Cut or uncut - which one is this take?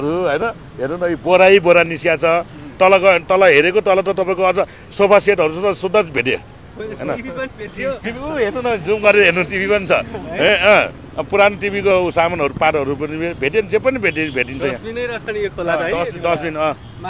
uncut